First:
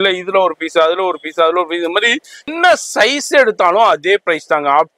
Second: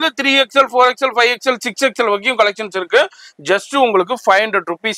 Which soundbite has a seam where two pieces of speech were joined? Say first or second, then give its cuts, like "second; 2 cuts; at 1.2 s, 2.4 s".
first; 1 cut; at 2.5 s